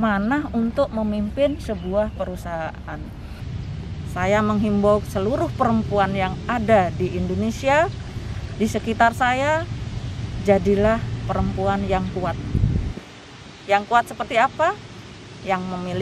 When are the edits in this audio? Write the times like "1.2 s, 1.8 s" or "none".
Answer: 3.5 s